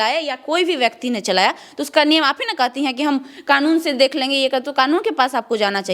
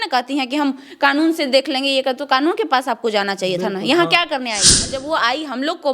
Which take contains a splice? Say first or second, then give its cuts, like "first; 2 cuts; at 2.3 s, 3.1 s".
second; 1 cut; at 4.9 s